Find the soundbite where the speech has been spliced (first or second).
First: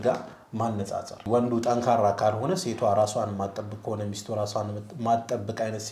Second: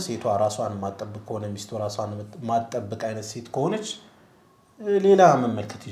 first